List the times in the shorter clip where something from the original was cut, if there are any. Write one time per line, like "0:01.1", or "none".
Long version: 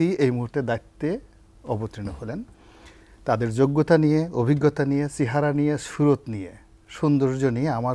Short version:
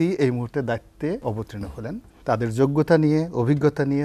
0:01.5